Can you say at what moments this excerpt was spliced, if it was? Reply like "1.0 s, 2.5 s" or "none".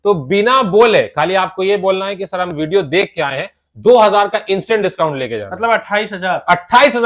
none